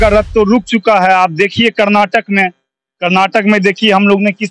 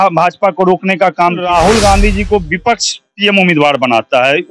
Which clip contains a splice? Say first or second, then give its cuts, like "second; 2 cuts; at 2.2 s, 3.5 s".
second; 1 cut; at 1.4 s